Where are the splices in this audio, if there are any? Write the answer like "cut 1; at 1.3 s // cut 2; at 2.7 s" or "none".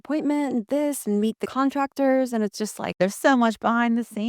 cut 1; at 1.4 s // cut 2; at 3.0 s